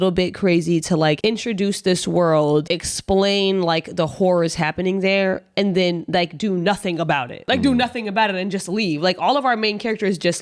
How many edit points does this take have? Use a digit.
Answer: 3